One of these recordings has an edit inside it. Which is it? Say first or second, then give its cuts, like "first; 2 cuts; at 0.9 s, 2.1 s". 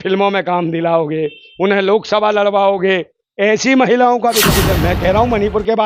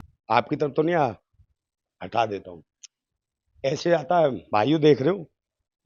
first; 1 cut; at 4.5 s